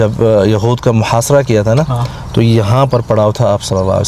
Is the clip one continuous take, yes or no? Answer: yes